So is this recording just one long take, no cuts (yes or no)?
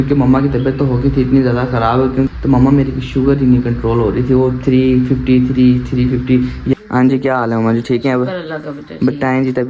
no